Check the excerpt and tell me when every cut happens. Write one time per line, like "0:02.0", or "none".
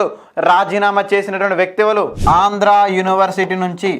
0:02.2